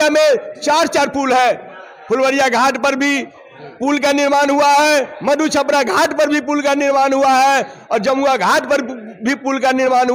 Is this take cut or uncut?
uncut